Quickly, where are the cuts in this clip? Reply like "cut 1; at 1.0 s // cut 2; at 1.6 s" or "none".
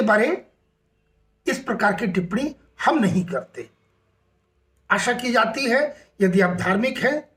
none